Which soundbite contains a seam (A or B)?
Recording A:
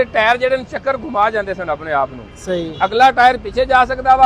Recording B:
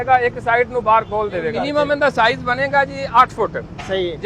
B